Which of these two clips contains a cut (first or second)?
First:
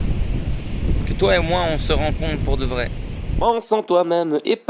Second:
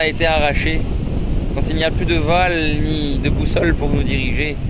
first